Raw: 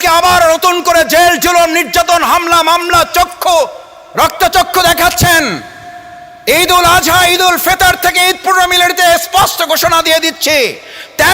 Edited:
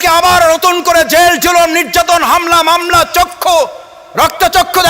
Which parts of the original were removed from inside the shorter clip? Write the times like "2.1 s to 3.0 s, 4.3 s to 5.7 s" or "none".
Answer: none